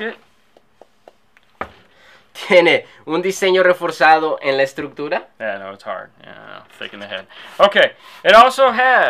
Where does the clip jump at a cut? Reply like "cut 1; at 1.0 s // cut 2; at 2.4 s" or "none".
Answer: none